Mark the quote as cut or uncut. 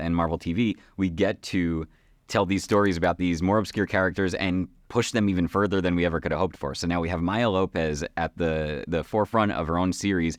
uncut